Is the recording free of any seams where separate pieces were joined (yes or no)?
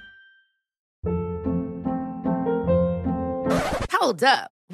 no